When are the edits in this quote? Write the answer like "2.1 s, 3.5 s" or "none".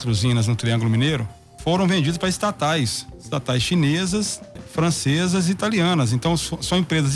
1.5 s, 4.6 s